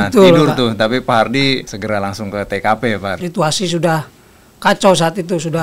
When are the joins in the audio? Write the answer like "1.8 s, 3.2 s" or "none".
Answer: 1.7 s, 3.2 s